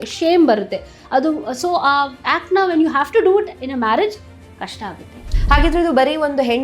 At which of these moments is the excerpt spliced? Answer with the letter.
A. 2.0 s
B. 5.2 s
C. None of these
B